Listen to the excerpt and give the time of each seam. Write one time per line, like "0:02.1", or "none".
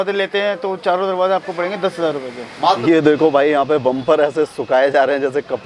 0:02.8